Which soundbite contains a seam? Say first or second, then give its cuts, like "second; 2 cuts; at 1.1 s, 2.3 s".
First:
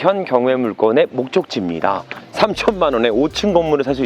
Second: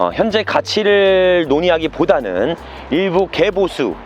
first; 1 cut; at 2.1 s